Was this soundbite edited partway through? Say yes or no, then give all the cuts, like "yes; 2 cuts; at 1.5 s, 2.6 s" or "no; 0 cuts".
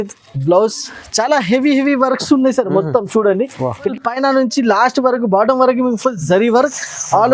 yes; 1 cut; at 3.9 s